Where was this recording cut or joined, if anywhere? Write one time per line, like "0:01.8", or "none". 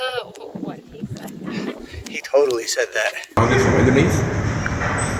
0:03.4